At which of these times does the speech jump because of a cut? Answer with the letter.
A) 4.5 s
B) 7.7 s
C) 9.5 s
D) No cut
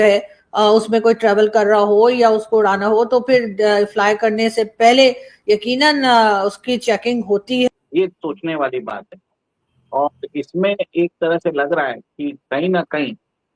B